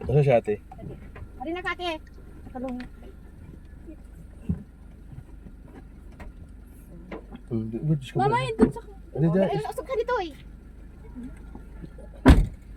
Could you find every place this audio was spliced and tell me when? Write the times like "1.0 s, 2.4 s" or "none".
none